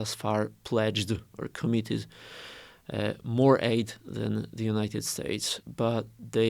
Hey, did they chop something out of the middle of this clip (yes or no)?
no